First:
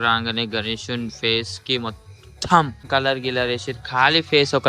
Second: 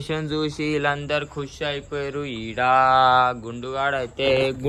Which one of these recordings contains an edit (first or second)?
first